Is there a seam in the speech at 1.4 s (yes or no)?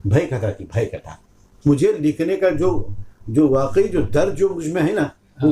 yes